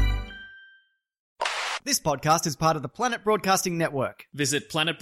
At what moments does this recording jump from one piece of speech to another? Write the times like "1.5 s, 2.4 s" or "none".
1.5 s